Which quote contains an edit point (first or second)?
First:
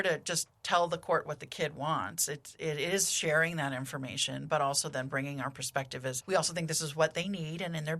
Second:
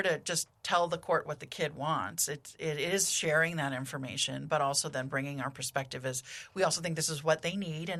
first